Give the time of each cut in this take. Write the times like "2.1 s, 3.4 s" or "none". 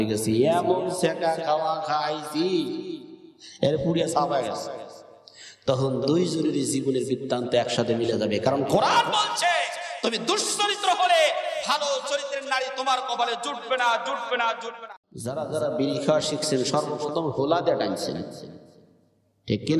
14.7 s